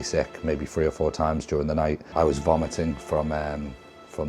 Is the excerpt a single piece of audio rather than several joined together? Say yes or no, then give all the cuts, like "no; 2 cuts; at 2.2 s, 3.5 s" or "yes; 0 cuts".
no; 1 cut; at 2.0 s